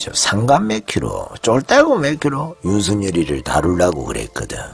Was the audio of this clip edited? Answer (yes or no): no